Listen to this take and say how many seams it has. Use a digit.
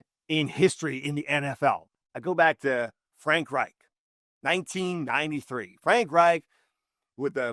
1